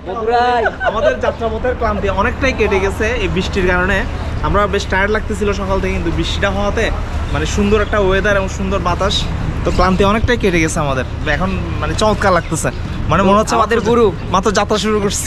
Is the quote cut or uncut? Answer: uncut